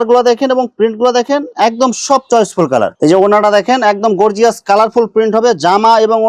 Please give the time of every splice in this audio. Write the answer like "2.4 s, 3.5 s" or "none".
2.9 s